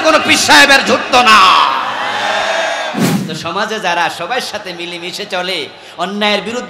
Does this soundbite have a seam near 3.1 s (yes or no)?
yes